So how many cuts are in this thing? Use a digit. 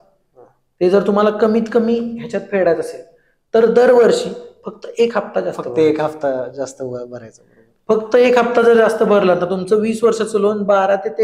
0